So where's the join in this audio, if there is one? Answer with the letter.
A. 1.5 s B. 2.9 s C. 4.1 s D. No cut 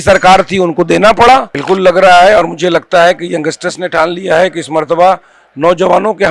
A